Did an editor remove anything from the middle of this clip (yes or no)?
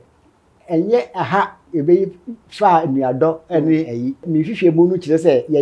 yes